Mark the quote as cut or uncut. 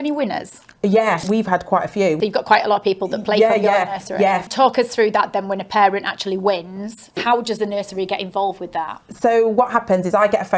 cut